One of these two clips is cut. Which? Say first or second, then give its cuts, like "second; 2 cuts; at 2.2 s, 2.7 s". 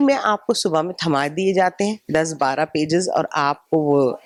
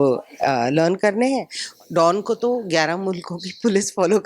second; 1 cut; at 1.6 s